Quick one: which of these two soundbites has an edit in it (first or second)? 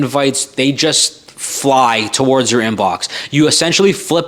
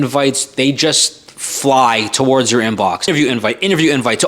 second